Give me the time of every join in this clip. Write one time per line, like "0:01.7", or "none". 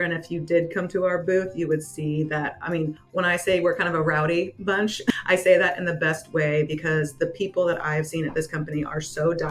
0:03.0
0:05.1